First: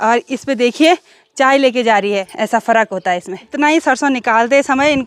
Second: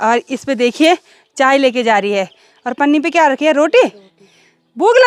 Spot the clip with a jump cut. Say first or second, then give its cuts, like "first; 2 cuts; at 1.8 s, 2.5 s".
first; 2 cuts; at 2.3 s, 3.4 s